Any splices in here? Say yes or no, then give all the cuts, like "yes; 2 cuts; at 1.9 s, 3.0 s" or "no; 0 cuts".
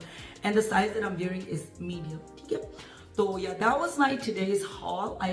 no; 0 cuts